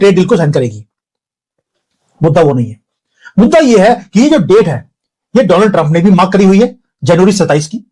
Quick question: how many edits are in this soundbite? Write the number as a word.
zero